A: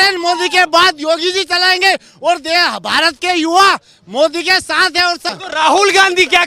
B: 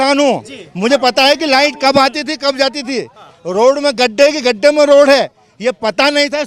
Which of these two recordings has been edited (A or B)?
A